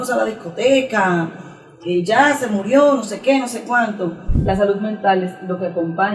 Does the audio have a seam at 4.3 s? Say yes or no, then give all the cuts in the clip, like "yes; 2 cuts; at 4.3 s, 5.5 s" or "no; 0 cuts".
yes; 1 cut; at 4.3 s